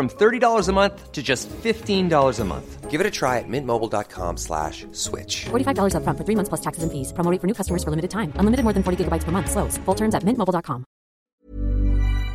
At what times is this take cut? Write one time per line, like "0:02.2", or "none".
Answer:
0:11.3